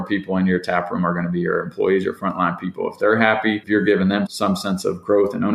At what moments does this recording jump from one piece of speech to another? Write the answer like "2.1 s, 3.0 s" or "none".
3.6 s